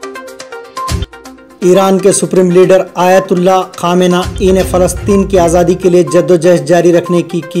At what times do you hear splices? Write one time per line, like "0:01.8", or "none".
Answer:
0:01.0